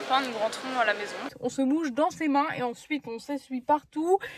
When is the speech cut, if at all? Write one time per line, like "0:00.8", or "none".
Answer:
0:01.3